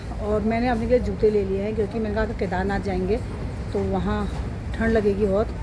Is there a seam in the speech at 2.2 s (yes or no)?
no